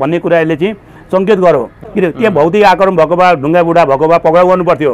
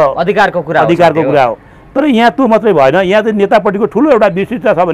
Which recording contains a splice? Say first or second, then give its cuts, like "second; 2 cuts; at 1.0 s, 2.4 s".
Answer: first; 1 cut; at 1.8 s